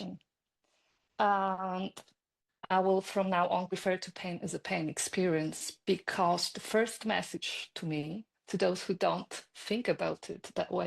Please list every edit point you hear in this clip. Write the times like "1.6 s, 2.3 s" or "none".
2.7 s, 3.7 s